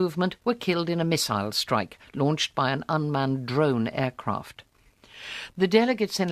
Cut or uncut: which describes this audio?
uncut